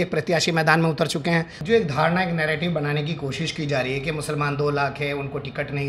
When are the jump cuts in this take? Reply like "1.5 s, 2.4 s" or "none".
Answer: 1.5 s